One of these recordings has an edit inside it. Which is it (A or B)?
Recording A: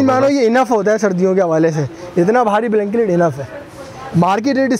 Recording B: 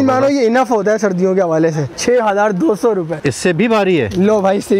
B